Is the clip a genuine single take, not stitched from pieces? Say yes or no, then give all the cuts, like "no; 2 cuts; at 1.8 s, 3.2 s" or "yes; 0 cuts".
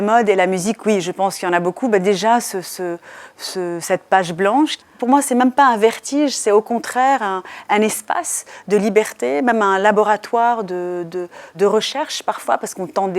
yes; 0 cuts